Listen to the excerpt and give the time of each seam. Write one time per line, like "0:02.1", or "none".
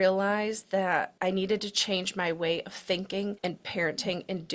0:01.1
0:03.4